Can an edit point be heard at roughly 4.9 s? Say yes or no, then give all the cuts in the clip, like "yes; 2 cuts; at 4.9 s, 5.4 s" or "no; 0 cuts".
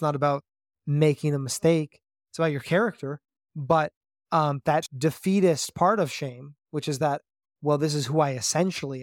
yes; 1 cut; at 4.9 s